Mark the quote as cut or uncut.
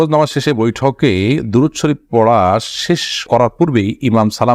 uncut